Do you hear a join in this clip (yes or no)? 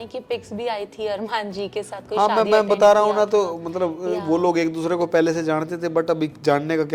no